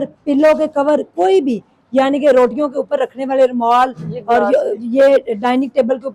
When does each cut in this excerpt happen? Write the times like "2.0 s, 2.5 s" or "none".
none